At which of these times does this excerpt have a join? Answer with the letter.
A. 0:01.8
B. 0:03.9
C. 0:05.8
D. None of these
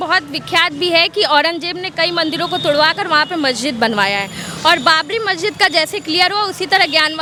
D